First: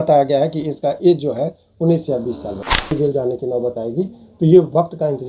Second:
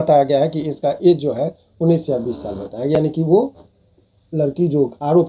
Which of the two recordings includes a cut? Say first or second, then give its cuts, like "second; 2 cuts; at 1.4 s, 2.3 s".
first; 1 cut; at 2.9 s